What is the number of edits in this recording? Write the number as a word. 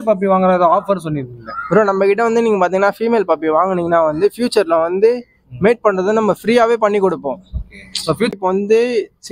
one